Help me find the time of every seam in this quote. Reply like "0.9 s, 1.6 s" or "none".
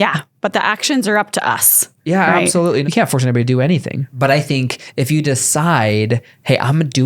2.8 s, 4.0 s